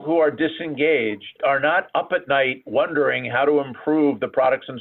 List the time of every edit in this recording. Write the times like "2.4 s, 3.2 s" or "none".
1.4 s